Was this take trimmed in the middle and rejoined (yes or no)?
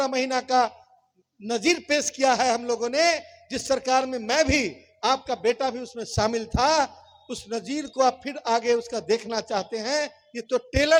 no